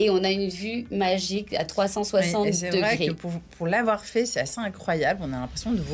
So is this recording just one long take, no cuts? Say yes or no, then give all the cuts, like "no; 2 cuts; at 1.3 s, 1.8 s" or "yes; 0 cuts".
yes; 0 cuts